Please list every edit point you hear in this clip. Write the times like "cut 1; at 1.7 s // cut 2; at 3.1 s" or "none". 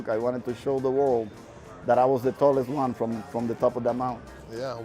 none